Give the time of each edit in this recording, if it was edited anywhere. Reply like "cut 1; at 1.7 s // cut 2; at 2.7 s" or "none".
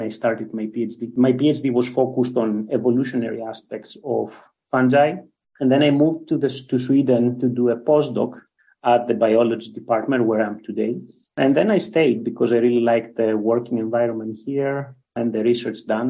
cut 1; at 1.0 s